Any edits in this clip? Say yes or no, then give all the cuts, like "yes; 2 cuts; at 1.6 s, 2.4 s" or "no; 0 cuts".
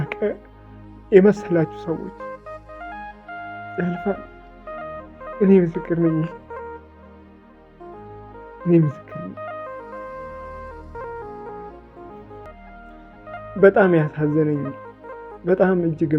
yes; 1 cut; at 12.6 s